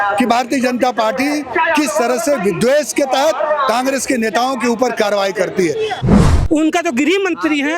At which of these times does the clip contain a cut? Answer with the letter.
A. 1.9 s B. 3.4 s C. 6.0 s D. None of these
C